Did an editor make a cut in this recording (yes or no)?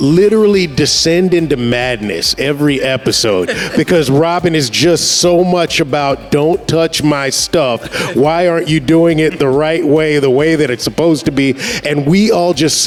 no